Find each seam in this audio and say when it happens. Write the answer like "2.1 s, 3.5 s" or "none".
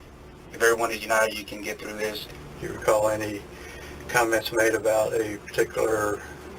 2.3 s